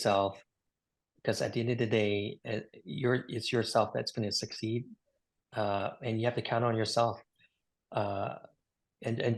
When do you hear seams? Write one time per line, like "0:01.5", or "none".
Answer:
none